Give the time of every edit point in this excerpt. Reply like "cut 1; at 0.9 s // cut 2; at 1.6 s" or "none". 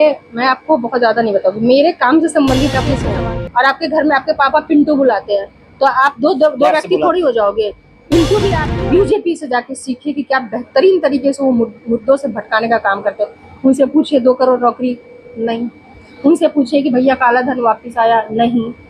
cut 1; at 3.0 s // cut 2; at 8.6 s